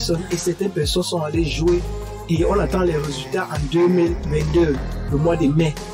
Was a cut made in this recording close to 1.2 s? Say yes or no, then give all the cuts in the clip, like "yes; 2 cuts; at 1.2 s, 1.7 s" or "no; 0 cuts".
no; 1 cut; at 4.2 s